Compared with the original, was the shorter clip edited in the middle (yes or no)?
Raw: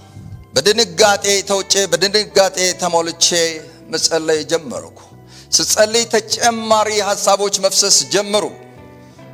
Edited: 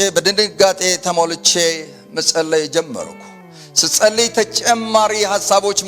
no